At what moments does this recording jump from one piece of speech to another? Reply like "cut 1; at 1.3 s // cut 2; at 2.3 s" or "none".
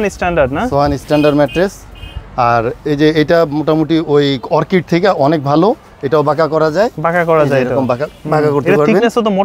none

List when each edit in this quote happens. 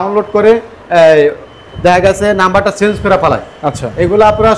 none

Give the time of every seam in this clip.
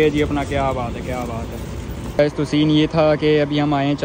cut 1; at 2.2 s

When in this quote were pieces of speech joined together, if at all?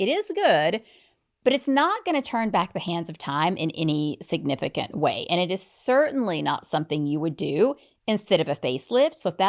none

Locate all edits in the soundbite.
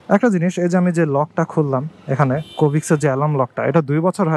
none

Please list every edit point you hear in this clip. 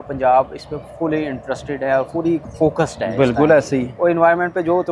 none

